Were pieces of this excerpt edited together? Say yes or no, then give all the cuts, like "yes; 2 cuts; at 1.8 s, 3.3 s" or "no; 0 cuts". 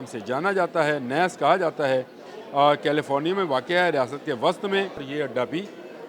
yes; 1 cut; at 5.1 s